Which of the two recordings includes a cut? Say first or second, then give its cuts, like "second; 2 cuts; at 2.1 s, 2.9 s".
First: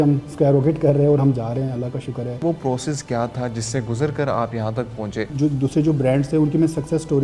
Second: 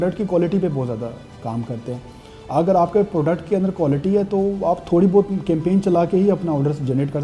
first; 2 cuts; at 2.4 s, 5.3 s